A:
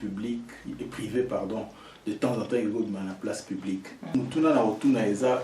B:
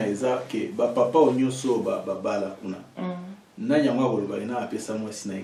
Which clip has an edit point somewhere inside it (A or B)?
A